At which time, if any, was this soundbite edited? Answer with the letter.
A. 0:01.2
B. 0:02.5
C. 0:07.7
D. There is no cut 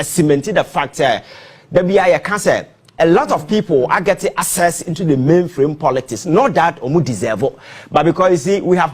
D